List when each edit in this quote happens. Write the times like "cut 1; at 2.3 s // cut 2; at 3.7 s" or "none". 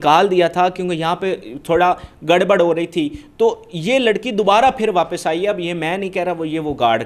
none

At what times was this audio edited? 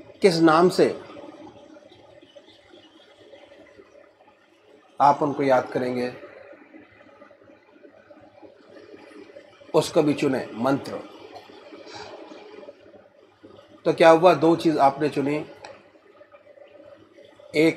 none

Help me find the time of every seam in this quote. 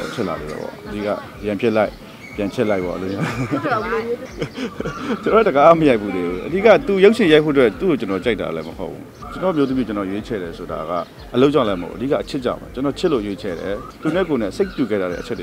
cut 1; at 4.3 s // cut 2; at 9.2 s // cut 3; at 13.9 s

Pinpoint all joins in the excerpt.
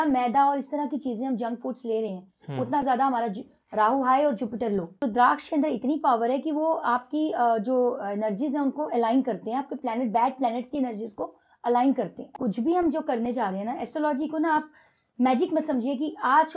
cut 1; at 5.0 s // cut 2; at 12.3 s

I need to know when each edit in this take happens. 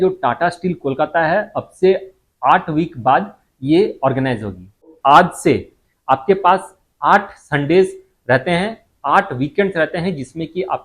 cut 1; at 4.9 s

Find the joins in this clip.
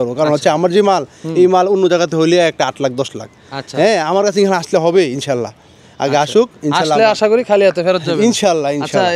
none

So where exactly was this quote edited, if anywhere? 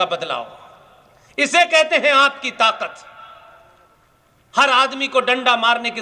none

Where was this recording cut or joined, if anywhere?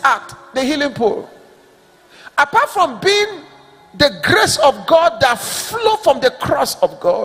none

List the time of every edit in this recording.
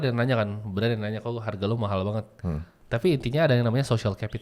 cut 1; at 2.7 s

